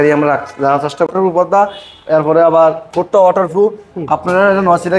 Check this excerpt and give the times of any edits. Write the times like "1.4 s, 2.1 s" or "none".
1.1 s